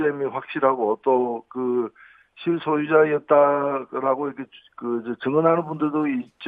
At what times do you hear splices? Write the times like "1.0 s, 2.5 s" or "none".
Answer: none